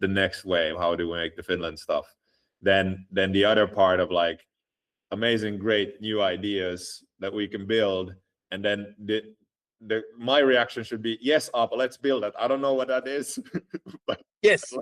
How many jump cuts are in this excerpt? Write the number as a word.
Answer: zero